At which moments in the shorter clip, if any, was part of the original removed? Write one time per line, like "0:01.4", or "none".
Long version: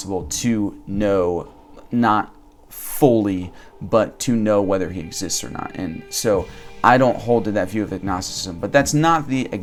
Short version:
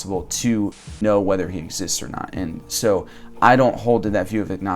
0:01.0